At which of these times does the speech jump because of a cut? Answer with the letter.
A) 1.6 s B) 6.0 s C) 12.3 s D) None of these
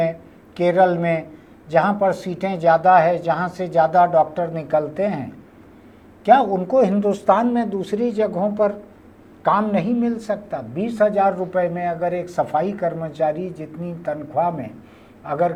D